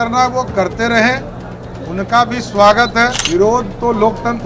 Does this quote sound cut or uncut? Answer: cut